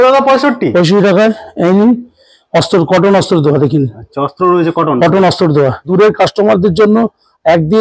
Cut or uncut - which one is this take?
cut